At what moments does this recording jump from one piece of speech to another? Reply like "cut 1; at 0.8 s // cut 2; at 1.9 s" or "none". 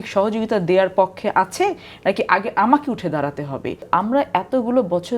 cut 1; at 3.8 s